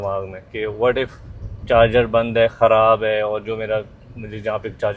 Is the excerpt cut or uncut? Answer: uncut